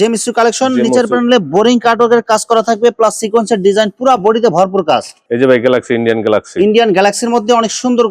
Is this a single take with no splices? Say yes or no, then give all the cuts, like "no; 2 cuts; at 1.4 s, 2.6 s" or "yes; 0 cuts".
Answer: no; 1 cut; at 5.2 s